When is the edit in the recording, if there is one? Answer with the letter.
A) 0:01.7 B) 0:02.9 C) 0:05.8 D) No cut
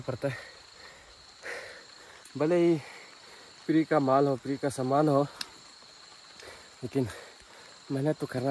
D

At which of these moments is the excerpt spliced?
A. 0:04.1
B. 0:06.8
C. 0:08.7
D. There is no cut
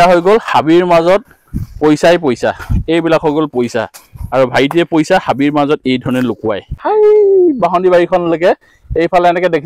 B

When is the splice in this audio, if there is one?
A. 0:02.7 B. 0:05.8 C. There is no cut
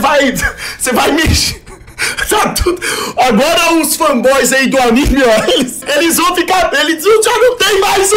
B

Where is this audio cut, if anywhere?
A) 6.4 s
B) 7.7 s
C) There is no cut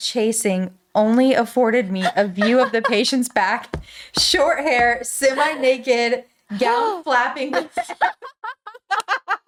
C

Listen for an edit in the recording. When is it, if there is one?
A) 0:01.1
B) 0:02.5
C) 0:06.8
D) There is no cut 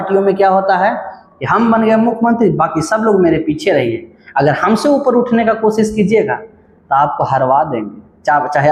D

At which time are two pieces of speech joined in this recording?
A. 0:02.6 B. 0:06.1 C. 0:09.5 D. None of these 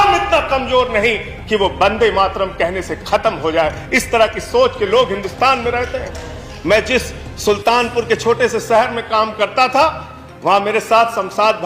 D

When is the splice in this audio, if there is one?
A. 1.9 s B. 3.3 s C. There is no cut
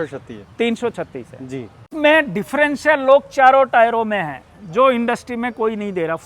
A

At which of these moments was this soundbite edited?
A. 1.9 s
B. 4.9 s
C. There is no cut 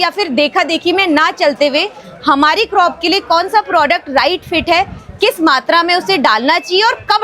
C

